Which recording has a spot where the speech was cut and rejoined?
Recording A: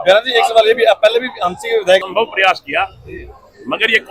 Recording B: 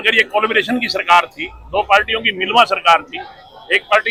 A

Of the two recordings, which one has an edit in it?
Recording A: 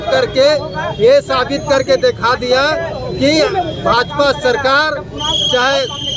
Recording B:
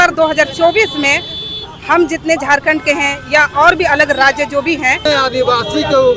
B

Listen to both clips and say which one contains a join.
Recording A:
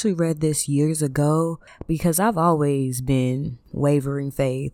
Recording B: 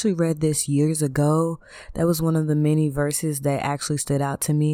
A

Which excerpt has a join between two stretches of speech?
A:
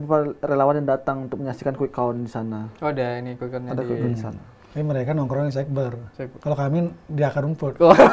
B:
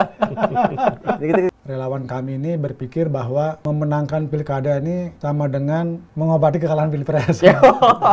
B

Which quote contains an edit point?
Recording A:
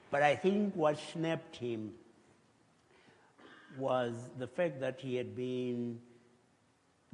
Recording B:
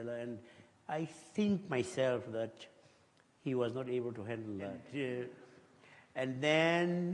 B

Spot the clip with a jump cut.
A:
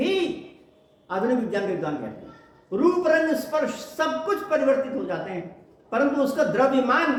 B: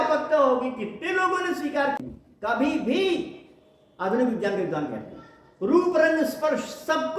B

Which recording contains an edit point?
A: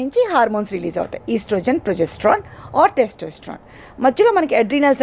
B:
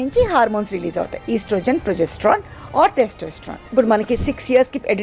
B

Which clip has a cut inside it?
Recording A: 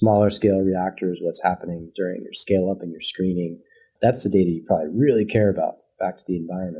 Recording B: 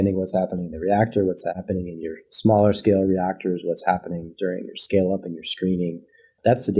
B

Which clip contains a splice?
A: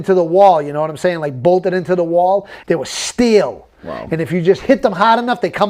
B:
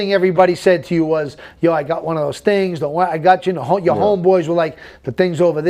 A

